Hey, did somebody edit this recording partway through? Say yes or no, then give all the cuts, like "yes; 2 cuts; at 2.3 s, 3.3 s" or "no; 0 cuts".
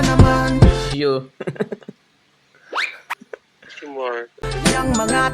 yes; 2 cuts; at 0.9 s, 4.4 s